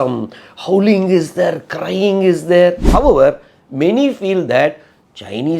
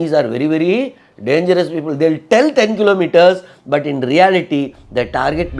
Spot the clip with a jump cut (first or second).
first